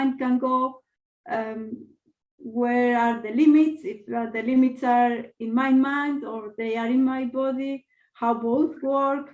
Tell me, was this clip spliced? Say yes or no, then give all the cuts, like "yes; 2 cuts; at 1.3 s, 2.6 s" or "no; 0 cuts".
no; 0 cuts